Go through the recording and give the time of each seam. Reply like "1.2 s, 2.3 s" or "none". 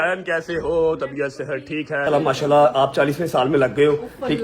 2.1 s

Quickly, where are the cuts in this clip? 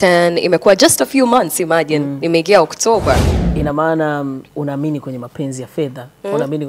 3.3 s

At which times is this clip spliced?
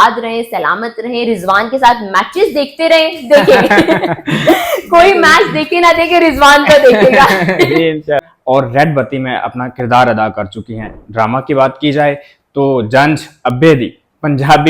8.2 s

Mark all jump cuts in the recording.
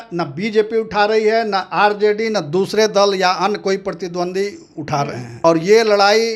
5.4 s

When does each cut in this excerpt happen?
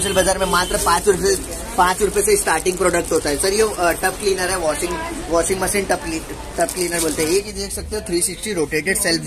7.3 s

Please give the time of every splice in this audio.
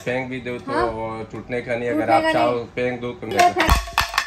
3.3 s

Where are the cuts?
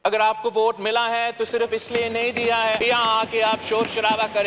2.8 s

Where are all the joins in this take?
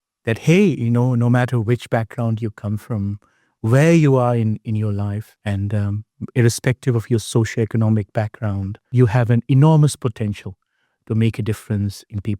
5.3 s, 8.8 s

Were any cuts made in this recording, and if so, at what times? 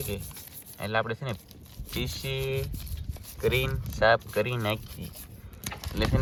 none

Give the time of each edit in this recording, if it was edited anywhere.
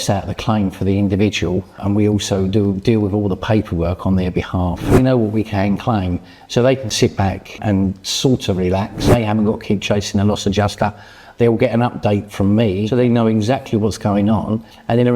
1.8 s, 4.9 s, 7.6 s, 9.1 s, 12.9 s

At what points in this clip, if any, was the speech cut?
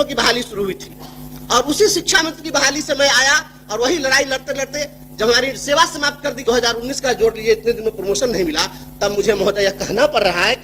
6.4 s

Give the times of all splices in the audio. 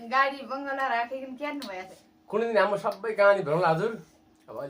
1.9 s

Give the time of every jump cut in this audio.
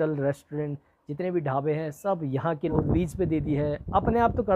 2.7 s

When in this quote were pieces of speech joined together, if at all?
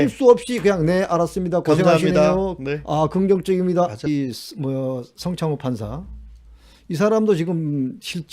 4.1 s

